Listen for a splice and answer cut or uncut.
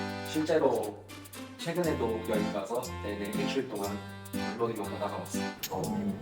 cut